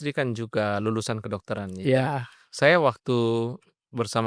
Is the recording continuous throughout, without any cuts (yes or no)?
yes